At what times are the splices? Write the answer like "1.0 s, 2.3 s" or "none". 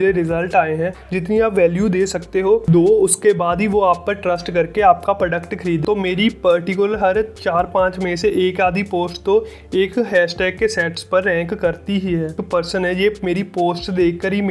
1.0 s, 5.8 s, 12.4 s